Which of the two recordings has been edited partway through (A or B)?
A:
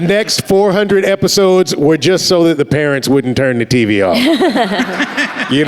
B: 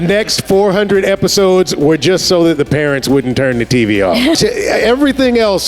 B